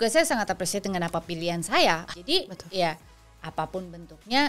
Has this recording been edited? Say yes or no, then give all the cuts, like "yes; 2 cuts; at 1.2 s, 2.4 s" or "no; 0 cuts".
yes; 1 cut; at 2.1 s